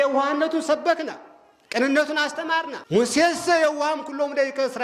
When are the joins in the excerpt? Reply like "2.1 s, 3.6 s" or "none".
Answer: 2.8 s